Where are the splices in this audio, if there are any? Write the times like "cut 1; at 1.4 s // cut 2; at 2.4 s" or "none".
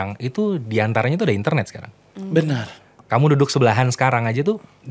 none